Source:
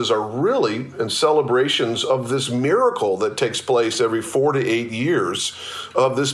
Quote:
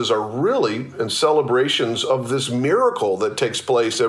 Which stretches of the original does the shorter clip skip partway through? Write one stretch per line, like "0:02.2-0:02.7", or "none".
none